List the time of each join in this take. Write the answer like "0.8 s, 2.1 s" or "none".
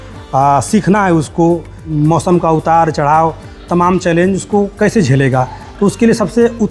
1.9 s